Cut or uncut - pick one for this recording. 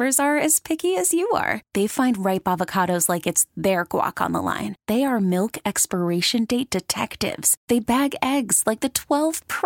uncut